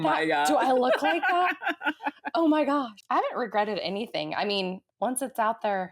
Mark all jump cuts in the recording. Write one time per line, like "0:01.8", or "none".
0:02.9
0:04.8